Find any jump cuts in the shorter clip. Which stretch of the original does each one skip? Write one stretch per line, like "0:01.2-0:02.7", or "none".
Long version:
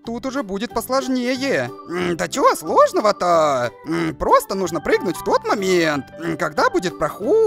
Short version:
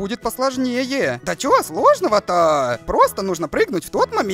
0:01.8-0:02.2
0:03.8-0:04.2